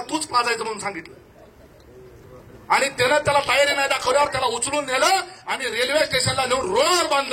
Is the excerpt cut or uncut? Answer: uncut